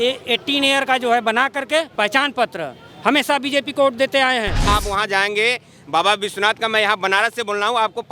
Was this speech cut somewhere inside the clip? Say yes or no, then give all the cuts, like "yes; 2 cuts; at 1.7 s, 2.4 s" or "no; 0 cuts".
yes; 2 cuts; at 1.9 s, 4.6 s